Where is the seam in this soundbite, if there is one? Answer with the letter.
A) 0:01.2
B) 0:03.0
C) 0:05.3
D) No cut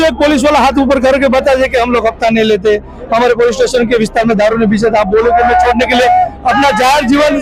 D